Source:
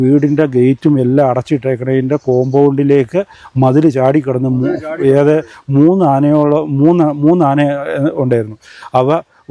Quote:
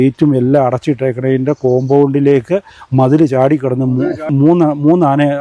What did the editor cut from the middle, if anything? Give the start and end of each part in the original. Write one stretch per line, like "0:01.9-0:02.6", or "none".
0:04.9-0:06.7